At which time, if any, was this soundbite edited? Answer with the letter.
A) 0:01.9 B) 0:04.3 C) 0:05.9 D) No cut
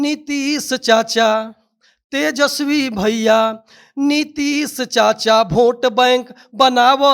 D